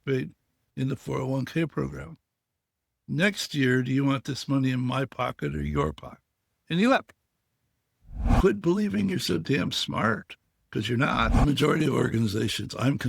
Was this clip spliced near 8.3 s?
yes; 2 cuts; at 8.3 s, 11.3 s

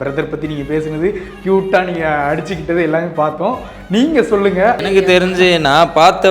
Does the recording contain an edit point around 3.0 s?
no; 1 cut; at 4.8 s

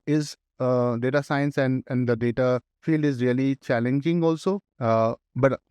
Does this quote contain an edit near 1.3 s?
no; 2 cuts; at 2.7 s, 4.7 s

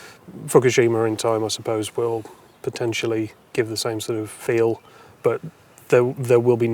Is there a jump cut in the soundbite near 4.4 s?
yes; 2 cuts; at 3.4 s, 4.4 s

